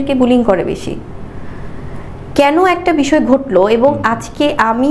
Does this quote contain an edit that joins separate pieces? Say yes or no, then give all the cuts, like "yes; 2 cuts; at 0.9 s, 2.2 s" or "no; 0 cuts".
no; 0 cuts